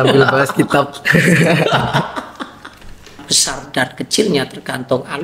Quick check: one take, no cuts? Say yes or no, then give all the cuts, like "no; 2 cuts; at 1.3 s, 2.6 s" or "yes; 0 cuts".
no; 1 cut; at 3.3 s